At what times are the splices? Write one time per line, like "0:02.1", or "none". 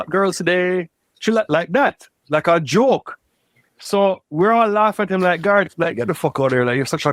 none